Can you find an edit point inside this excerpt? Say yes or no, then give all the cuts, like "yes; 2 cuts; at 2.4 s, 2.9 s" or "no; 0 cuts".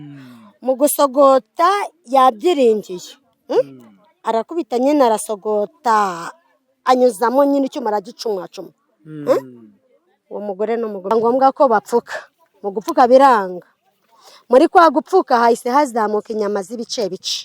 yes; 1 cut; at 11.1 s